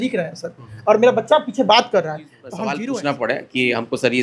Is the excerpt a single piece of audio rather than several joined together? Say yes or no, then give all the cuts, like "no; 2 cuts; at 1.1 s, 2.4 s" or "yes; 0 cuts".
no; 1 cut; at 2.8 s